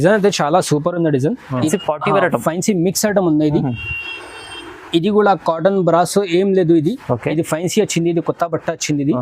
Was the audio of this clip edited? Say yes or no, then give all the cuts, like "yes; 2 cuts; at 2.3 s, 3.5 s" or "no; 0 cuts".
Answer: yes; 1 cut; at 1.7 s